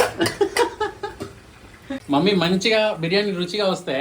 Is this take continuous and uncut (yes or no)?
no